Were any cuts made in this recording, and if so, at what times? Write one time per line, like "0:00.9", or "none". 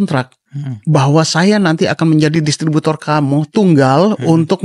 none